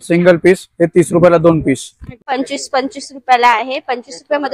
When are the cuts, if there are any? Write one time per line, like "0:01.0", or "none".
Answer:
0:02.2